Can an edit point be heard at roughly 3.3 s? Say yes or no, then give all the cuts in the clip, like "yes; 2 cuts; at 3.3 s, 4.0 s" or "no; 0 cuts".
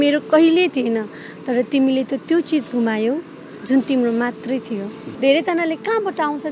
no; 1 cut; at 5.0 s